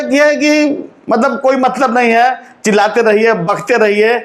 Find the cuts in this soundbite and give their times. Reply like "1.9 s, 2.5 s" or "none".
none